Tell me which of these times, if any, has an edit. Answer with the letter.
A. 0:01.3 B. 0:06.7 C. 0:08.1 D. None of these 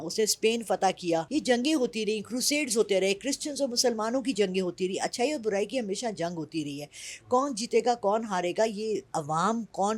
A